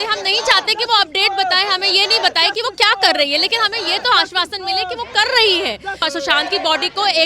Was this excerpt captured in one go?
no; 1 cut; at 6.0 s

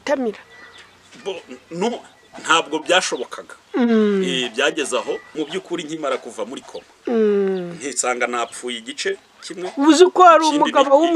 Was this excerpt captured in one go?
no; 1 cut; at 5.3 s

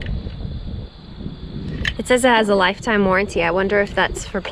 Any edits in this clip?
no; 0 cuts

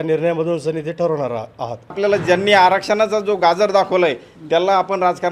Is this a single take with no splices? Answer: no; 1 cut; at 2.0 s

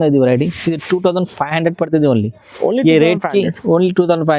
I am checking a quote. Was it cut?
no; 0 cuts

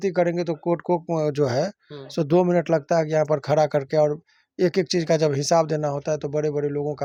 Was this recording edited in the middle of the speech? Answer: no; 0 cuts

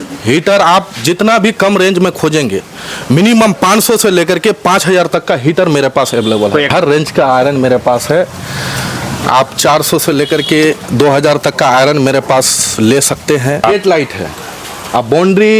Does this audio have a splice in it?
yes; 2 cuts; at 6.7 s, 13.6 s

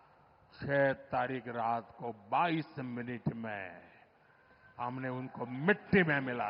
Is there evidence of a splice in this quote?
no; 0 cuts

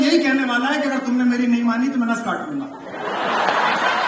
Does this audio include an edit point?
no; 0 cuts

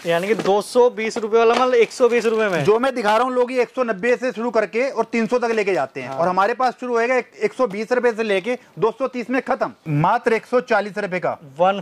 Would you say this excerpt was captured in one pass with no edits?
no; 1 cut; at 9.8 s

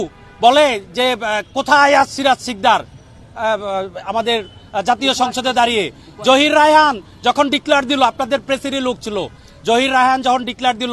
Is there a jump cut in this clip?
no; 0 cuts

